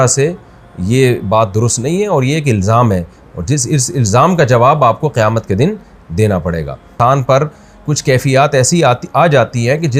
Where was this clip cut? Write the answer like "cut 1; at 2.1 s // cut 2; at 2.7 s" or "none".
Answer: cut 1; at 6.9 s